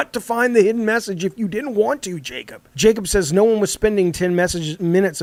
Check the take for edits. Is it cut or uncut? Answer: uncut